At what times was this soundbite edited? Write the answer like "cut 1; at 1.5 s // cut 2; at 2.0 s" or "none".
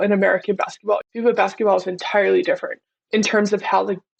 cut 1; at 1.0 s // cut 2; at 2.9 s